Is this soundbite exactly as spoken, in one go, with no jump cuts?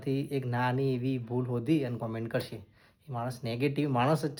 yes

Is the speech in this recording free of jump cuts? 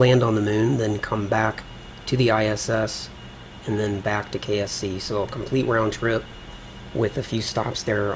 yes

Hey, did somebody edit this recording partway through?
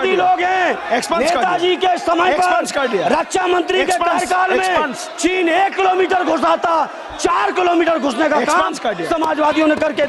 no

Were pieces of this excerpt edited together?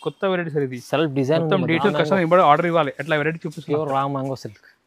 yes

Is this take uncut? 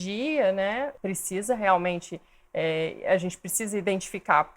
no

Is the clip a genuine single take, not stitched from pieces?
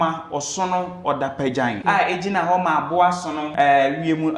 no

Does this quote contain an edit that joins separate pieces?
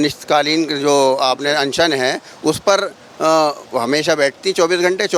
no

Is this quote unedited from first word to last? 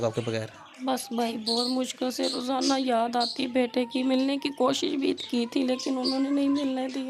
yes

